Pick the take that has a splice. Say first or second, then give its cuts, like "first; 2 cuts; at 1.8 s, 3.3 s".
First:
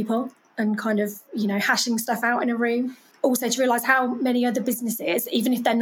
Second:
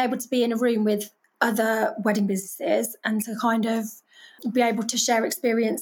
first; 1 cut; at 3.0 s